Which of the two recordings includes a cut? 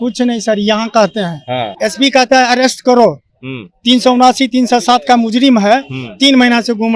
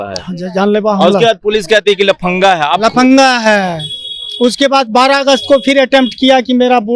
first; 1 cut; at 1.6 s

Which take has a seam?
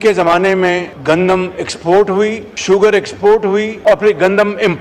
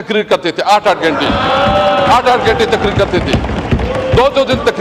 first; 3 cuts; at 0.9 s, 2.5 s, 3.7 s

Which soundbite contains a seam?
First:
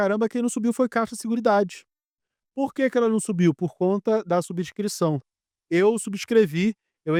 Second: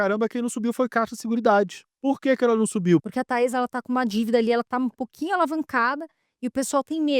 second; 2 cuts; at 1.8 s, 3.1 s

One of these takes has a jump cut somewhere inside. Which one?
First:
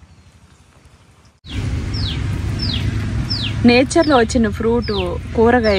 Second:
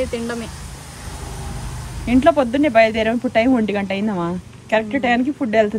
first; 1 cut; at 1.5 s

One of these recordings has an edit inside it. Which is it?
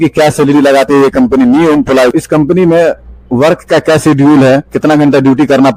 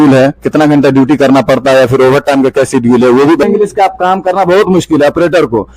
second; 1 cut; at 3.4 s

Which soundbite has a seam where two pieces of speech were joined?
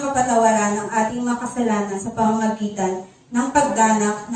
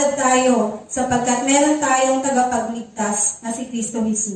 first; 1 cut; at 2.0 s

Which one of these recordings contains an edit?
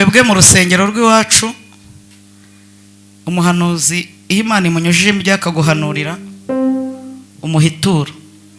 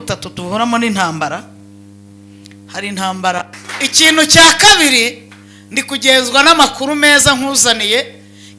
second; 1 cut; at 3.6 s

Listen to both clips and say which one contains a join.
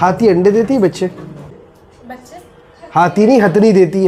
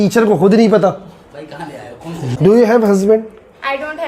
second; 1 cut; at 2.2 s

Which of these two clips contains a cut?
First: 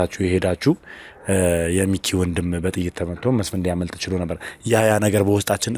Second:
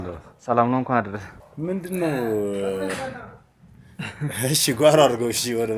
second; 1 cut; at 1.4 s

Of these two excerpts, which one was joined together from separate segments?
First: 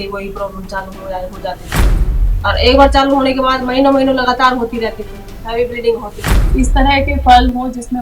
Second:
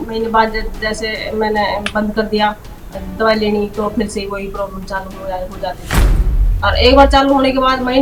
first; 1 cut; at 6.4 s

